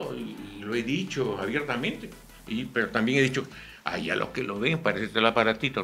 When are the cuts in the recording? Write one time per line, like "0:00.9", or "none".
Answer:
none